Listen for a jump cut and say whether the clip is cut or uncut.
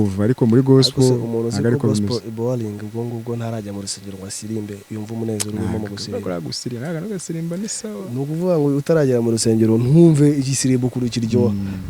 uncut